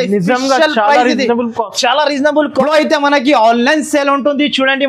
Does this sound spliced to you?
yes; 1 cut; at 2.5 s

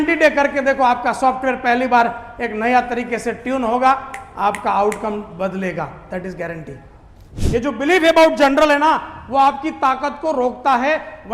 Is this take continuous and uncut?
no; 1 cut; at 7.2 s

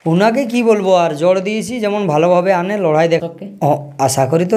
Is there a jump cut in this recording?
yes; 1 cut; at 3.2 s

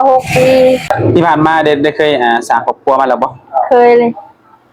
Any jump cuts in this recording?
yes; 1 cut; at 1.0 s

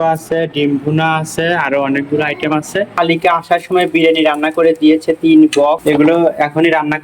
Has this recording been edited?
yes; 2 cuts; at 2.9 s, 5.8 s

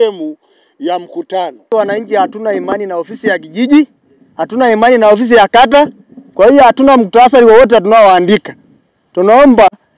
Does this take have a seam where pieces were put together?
yes; 1 cut; at 1.6 s

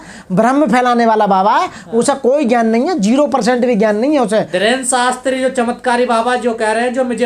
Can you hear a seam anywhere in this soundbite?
no; 0 cuts

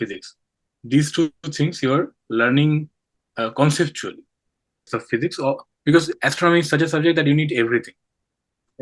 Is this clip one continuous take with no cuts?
no; 1 cut; at 4.9 s

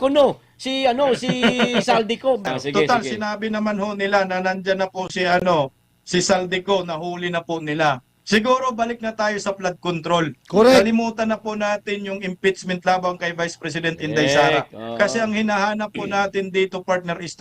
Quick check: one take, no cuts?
no; 1 cut; at 2.4 s

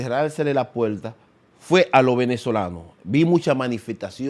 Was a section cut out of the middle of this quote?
no; 0 cuts

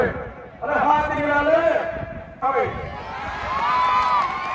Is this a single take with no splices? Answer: no; 1 cut; at 2.4 s

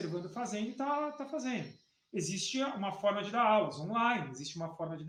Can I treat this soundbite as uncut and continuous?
yes; 0 cuts

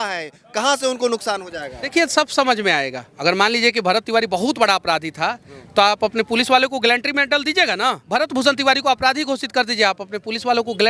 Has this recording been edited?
yes; 3 cuts; at 1.9 s, 3.0 s, 8.0 s

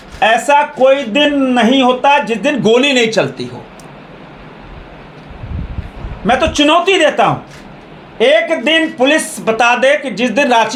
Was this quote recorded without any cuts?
yes; 0 cuts

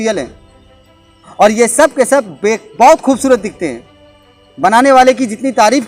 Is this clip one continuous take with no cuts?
yes; 0 cuts

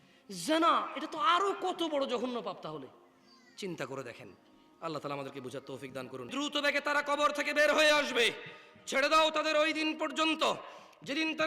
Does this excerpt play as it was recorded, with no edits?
no; 1 cut; at 6.3 s

